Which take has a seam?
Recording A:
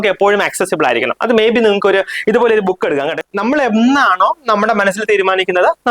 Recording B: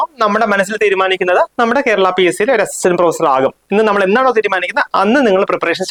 A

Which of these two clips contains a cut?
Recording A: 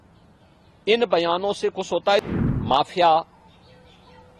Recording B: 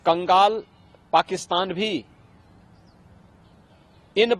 A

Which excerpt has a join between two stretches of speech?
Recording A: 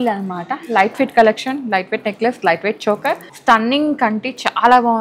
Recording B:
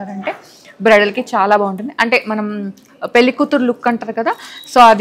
A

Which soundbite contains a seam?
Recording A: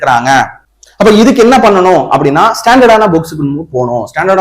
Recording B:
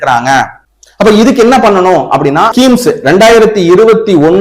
B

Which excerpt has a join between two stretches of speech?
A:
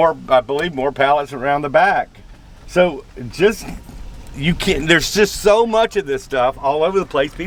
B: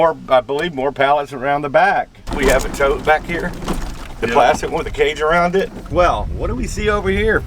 B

